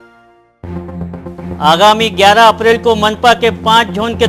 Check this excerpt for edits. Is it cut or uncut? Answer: uncut